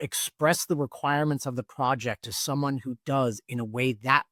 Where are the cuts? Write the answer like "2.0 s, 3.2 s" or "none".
none